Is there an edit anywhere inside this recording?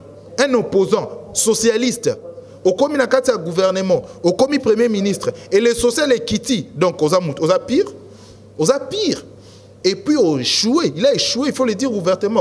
no; 0 cuts

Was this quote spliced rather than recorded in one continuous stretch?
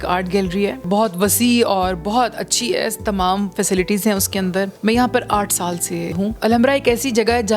yes; 3 cuts; at 0.8 s, 4.7 s, 6.3 s

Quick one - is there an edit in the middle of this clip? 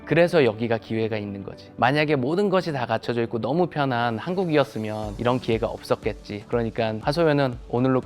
yes; 1 cut; at 6.7 s

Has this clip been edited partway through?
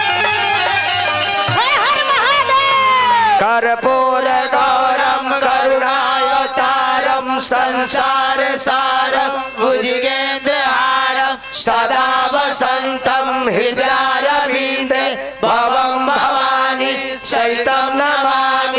yes; 1 cut; at 3.4 s

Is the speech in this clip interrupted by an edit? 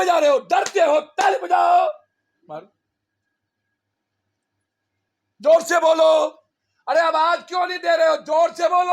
no; 0 cuts

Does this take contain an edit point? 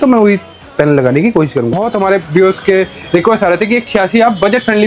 yes; 1 cut; at 1.8 s

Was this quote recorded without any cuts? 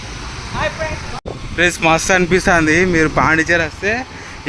no; 1 cut; at 1.2 s

